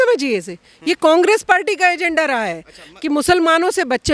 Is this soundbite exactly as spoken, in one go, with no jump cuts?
yes; 0 cuts

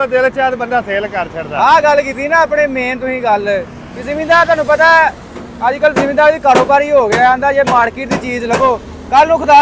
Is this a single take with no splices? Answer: yes; 0 cuts

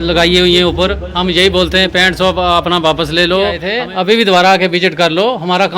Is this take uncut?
no; 1 cut; at 3.7 s

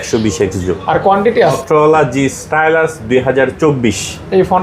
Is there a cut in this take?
yes; 1 cut; at 1.6 s

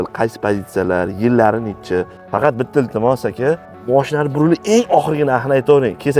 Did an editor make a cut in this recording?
yes; 2 cuts; at 2.2 s, 3.7 s

